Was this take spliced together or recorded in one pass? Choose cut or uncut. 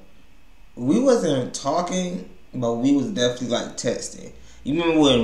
uncut